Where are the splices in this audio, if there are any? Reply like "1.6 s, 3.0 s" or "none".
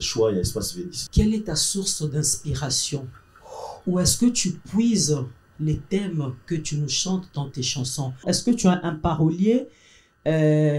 0.9 s, 8.2 s